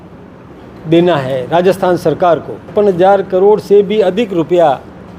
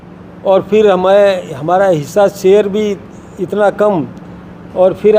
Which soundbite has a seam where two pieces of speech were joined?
first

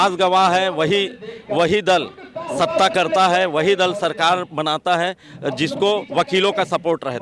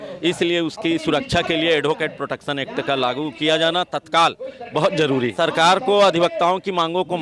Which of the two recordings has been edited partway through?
second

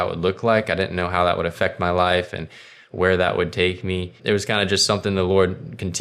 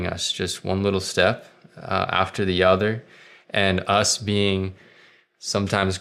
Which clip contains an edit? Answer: first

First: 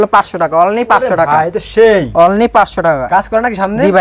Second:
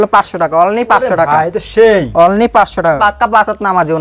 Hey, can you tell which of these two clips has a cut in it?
second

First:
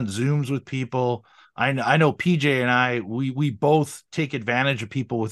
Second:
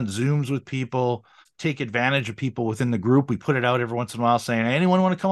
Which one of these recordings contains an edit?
second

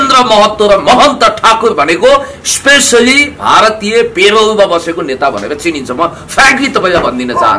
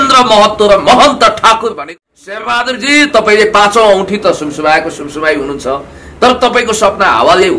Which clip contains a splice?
second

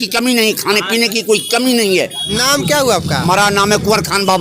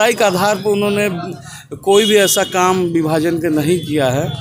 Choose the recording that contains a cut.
first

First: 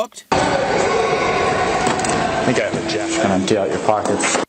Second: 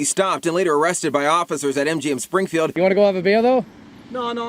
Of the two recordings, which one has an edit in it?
second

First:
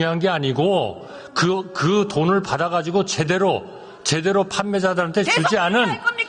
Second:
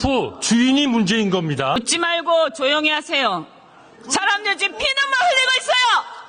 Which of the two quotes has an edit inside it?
second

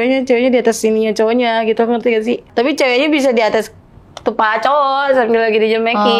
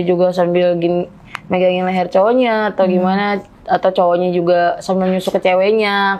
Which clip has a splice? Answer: first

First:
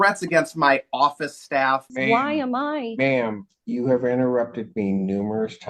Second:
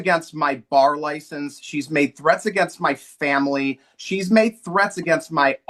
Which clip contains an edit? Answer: first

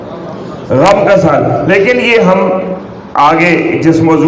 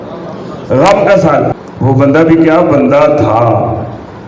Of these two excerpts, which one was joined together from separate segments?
second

